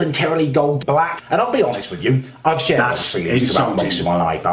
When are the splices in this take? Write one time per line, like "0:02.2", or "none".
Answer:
0:00.9